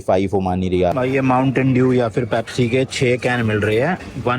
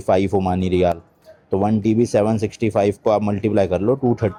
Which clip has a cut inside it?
first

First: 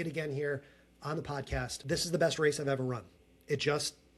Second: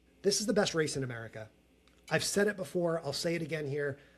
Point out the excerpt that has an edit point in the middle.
first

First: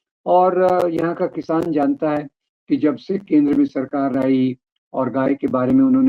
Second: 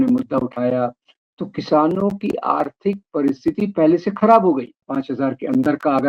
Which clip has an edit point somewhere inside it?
second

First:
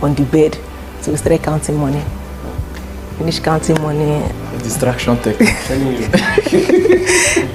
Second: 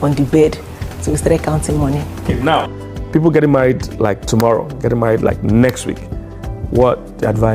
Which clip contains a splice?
second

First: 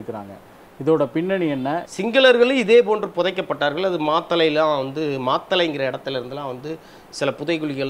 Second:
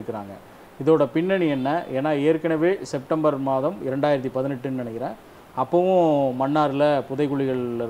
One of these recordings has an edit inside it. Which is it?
first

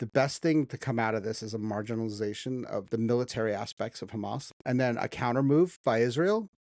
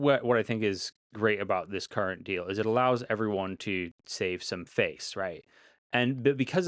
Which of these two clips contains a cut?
first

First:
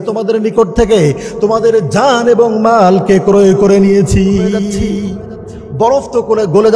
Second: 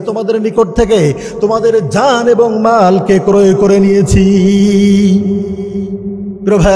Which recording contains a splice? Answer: first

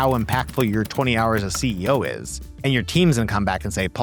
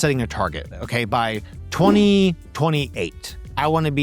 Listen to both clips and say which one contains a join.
second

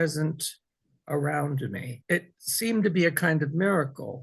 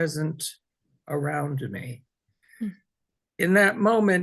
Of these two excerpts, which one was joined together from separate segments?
first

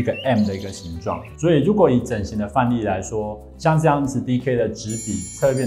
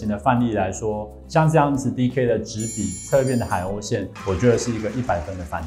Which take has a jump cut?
first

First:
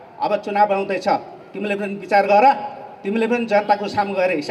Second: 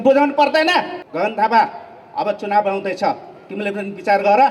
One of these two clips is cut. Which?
second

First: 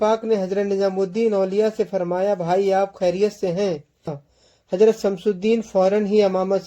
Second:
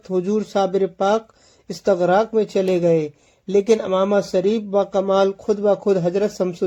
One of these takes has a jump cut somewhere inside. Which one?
first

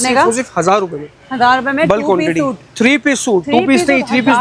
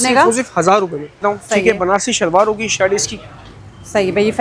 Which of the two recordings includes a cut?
second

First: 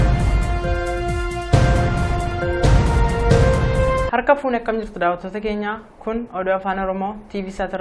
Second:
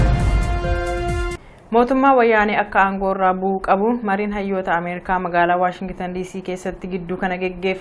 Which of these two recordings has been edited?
second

